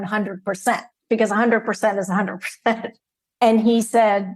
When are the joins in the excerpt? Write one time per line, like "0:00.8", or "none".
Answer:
0:03.0